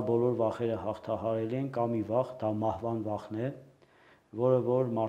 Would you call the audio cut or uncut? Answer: uncut